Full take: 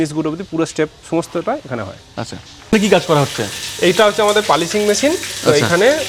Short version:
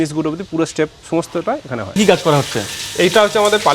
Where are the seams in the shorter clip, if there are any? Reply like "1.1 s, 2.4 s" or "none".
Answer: 2.0 s